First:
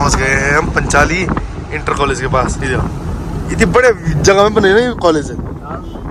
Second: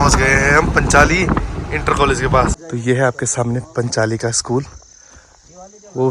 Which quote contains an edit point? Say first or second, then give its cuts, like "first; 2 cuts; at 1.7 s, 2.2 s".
second; 1 cut; at 2.6 s